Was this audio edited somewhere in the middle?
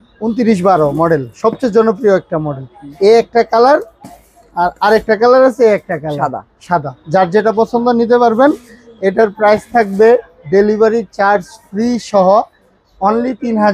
no; 0 cuts

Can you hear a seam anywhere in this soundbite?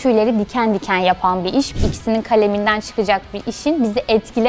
yes; 1 cut; at 1.8 s

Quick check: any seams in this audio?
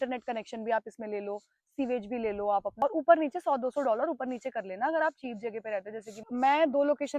yes; 2 cuts; at 2.8 s, 6.2 s

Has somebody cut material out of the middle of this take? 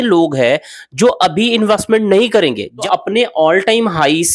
yes; 1 cut; at 2.7 s

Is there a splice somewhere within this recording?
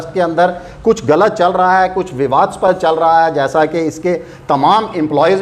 no; 0 cuts

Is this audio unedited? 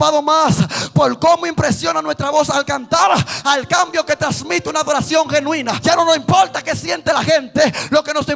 no; 1 cut; at 5.8 s

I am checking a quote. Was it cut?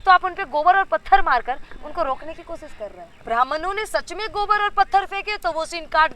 yes; 1 cut; at 3.2 s

